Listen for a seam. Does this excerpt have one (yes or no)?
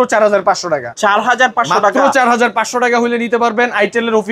no